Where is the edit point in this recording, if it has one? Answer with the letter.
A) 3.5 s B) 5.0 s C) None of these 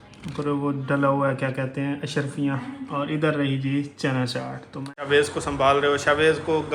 B